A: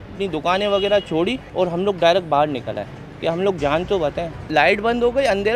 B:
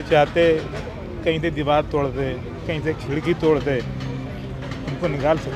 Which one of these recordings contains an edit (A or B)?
A